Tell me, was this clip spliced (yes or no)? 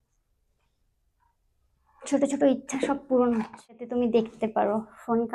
yes